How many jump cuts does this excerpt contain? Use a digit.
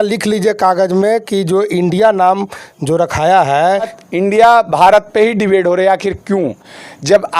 1